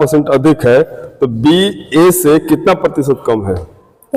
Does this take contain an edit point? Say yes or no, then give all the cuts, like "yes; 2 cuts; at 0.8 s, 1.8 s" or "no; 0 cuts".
no; 0 cuts